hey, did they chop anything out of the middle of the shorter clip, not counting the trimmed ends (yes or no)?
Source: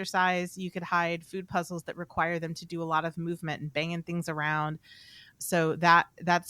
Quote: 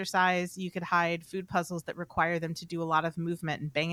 no